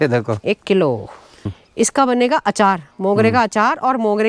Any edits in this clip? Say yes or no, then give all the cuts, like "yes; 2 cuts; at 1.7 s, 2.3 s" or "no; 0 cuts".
yes; 1 cut; at 1.6 s